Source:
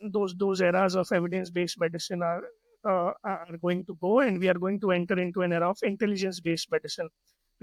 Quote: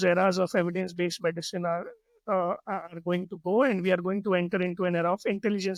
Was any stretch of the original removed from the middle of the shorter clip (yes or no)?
no